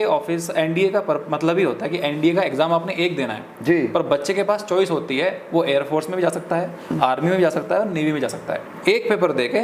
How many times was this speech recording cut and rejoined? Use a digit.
0